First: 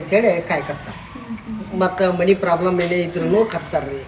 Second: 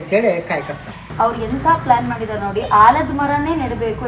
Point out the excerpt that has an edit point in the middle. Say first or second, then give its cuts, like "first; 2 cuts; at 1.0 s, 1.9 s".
second; 1 cut; at 1.1 s